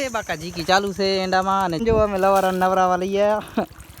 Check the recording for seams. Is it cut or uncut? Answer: cut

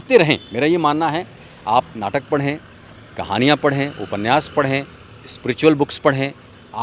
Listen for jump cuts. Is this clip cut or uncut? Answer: uncut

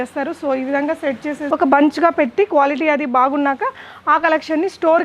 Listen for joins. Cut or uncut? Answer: cut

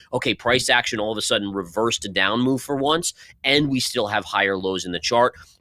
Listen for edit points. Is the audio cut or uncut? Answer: uncut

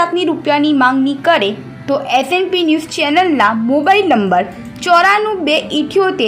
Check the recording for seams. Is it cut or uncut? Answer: uncut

